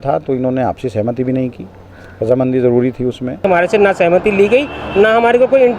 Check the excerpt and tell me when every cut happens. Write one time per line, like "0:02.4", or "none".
0:03.5